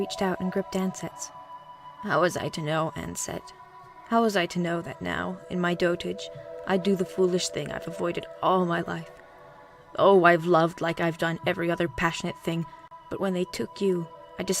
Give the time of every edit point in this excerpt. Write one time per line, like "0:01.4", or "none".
0:06.3